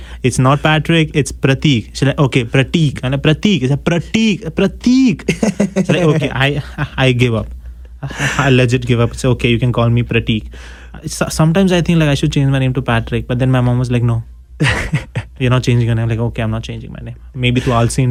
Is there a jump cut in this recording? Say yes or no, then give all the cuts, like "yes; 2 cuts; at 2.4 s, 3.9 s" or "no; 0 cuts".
no; 0 cuts